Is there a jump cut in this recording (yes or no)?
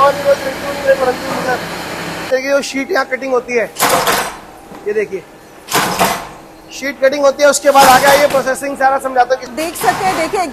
yes